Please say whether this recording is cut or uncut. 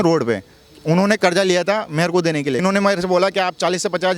cut